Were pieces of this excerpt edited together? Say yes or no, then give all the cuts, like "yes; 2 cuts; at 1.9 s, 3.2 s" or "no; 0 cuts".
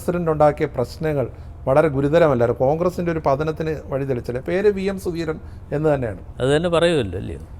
yes; 1 cut; at 6.2 s